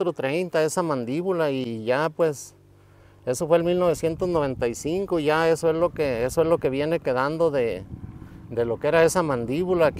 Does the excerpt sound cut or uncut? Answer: uncut